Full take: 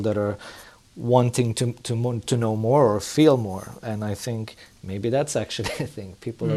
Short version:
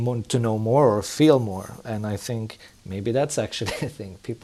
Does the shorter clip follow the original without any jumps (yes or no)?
yes